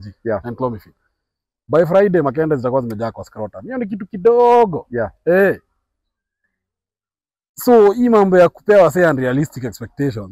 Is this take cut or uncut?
uncut